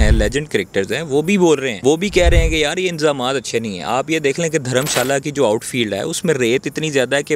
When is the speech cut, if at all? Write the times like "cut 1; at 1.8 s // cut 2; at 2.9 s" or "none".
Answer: cut 1; at 1.7 s